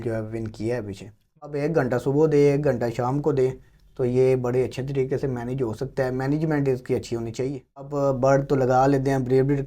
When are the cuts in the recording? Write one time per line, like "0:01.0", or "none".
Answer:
0:01.6
0:07.9

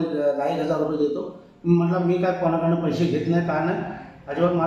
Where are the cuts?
none

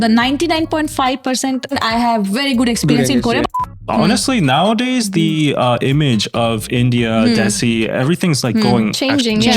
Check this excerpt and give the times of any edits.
0:01.7
0:03.6

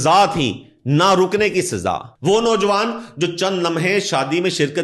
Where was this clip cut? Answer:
0:02.1

